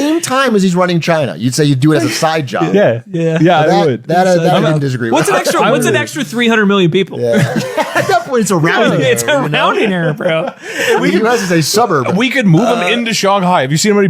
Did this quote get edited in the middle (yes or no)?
no